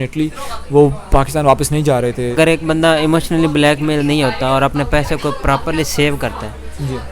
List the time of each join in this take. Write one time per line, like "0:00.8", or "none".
0:02.3